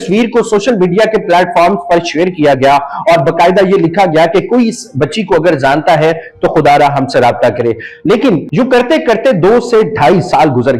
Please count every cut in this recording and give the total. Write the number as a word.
zero